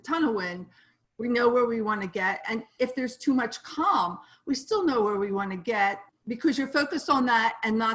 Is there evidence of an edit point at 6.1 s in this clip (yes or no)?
yes